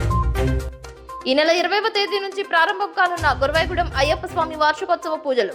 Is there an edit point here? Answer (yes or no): yes